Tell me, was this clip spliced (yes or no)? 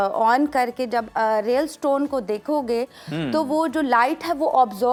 no